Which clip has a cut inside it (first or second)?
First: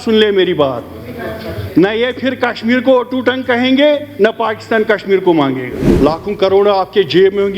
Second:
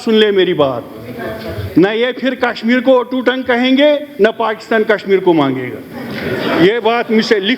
first